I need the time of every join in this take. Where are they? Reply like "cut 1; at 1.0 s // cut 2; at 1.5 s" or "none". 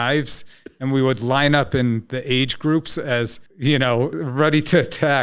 cut 1; at 3.4 s // cut 2; at 4.1 s